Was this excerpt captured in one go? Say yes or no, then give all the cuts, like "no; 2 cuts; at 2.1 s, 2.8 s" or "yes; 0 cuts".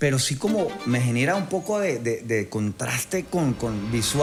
yes; 0 cuts